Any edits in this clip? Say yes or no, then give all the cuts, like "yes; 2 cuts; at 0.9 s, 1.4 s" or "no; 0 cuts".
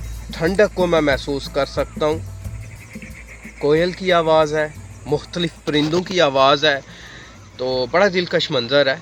no; 0 cuts